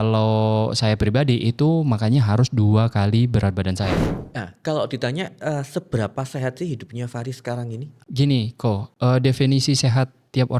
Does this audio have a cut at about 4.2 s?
yes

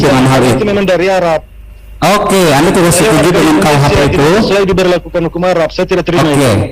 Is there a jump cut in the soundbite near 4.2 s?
no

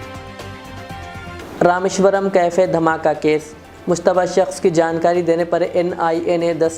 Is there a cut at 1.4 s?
yes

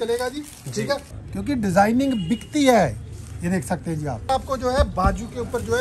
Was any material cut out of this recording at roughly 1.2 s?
yes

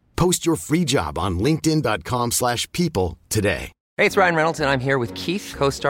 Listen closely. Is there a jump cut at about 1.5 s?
no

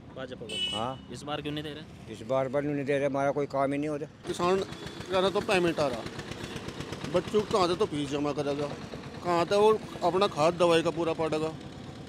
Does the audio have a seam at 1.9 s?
no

